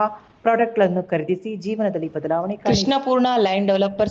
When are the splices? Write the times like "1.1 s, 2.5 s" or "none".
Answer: 2.6 s